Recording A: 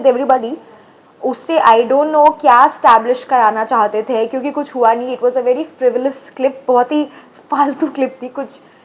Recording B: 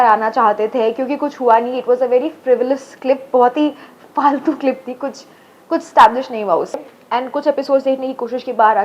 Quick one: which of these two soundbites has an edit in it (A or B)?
B